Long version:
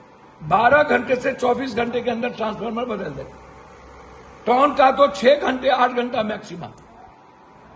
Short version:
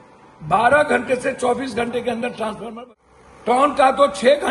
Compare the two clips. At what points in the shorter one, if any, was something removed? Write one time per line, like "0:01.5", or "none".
0:02.7